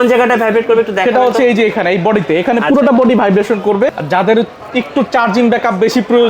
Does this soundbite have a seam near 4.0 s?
yes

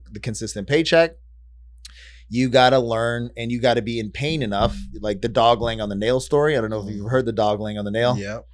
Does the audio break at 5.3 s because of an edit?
no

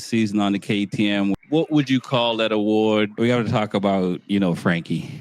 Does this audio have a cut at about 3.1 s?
yes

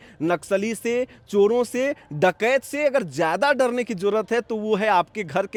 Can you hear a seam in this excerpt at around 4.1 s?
no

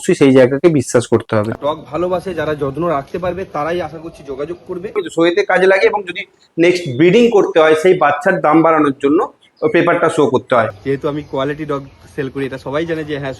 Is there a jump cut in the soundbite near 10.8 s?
yes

